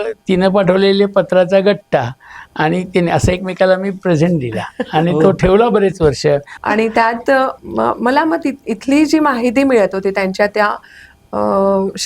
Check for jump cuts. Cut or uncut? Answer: cut